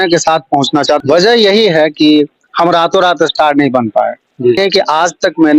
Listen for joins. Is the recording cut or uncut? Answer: cut